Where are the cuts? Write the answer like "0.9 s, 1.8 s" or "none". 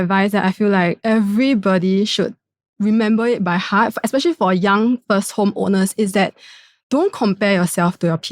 1.0 s

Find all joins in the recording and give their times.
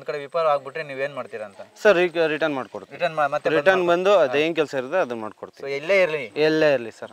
none

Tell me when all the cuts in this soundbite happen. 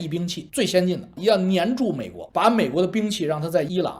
0.8 s, 2.1 s

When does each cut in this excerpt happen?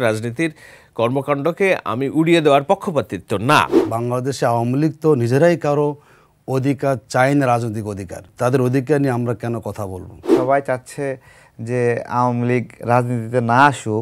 3.8 s, 8.3 s, 10.3 s

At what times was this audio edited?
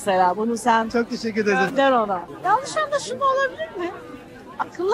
2.3 s

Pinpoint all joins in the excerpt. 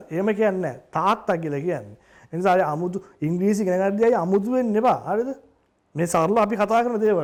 none

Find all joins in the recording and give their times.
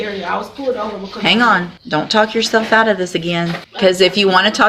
1.8 s, 3.6 s

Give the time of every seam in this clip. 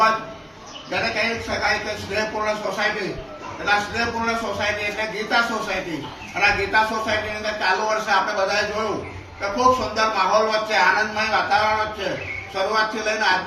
1.9 s

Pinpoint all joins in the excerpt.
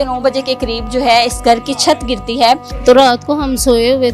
2.7 s

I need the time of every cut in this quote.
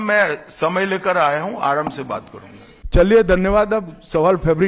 none

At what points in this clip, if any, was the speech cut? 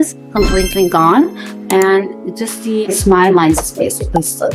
2.9 s

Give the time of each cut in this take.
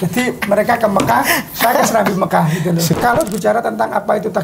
2.9 s

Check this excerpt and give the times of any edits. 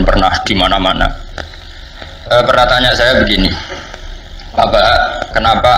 none

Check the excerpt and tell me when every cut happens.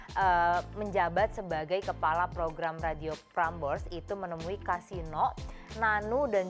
none

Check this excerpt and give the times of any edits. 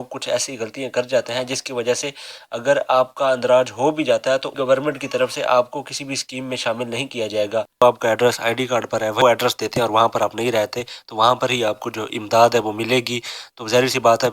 7.8 s, 9.2 s

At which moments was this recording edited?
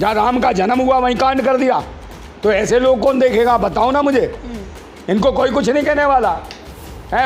none

